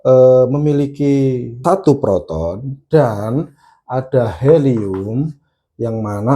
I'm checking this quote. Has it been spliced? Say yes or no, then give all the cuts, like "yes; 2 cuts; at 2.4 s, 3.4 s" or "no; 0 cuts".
yes; 1 cut; at 1.6 s